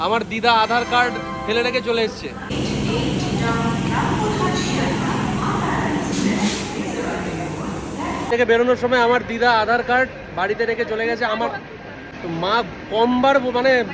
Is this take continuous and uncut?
yes; 0 cuts

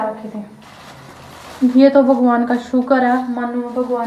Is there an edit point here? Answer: no; 0 cuts

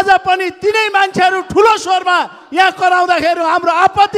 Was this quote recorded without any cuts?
yes; 0 cuts

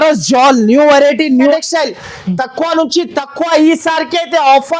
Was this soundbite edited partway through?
yes; 1 cut; at 1.5 s

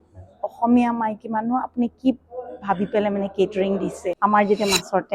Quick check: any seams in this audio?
yes; 1 cut; at 4.2 s

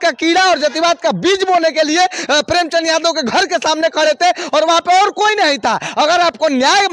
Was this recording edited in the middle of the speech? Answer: no; 0 cuts

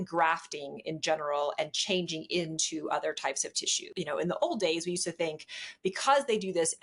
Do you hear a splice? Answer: yes; 1 cut; at 3.9 s

